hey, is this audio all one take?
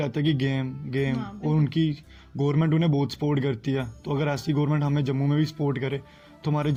yes; 0 cuts

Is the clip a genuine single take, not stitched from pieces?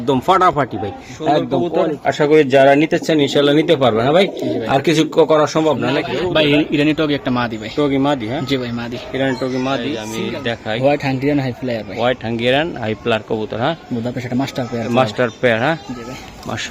no; 3 cuts; at 1.7 s, 6.0 s, 10.1 s

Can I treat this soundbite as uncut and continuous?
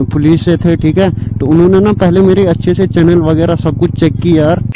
yes; 0 cuts

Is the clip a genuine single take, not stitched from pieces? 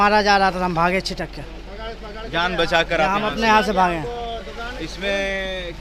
yes; 0 cuts

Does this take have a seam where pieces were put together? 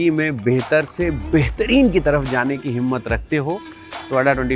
no; 0 cuts

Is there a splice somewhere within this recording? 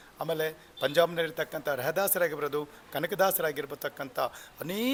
no; 0 cuts

